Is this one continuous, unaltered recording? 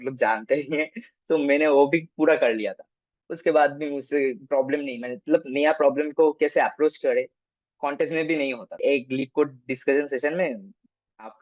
no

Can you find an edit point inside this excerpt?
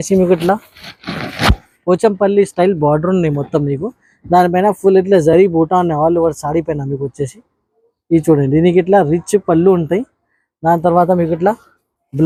no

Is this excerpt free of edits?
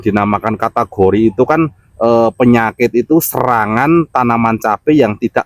yes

